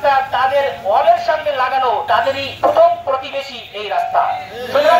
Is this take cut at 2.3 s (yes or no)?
yes